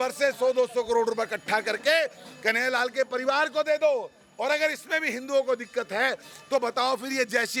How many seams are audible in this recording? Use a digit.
0